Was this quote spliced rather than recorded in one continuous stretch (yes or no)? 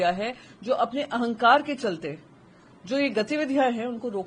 no